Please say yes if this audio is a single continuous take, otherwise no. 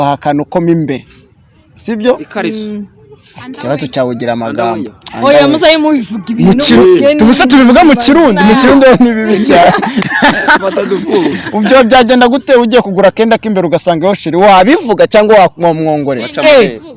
yes